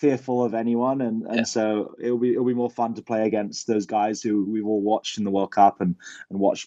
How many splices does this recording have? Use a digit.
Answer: 0